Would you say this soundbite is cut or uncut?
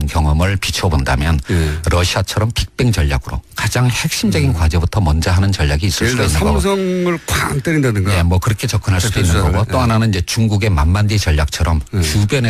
uncut